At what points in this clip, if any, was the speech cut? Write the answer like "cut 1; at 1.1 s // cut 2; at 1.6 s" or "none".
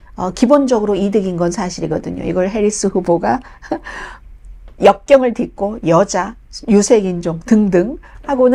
none